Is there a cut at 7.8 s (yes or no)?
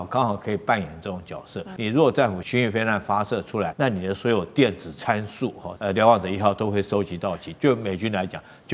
no